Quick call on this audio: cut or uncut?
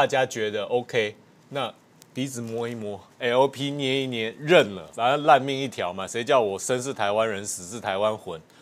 cut